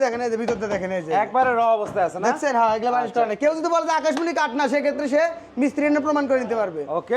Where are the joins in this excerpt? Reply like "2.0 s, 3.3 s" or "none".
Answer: none